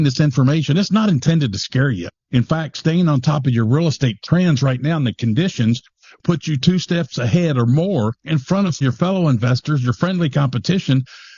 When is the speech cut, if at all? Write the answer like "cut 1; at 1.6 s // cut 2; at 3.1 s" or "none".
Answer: cut 1; at 2.1 s // cut 2; at 6.2 s // cut 3; at 8.8 s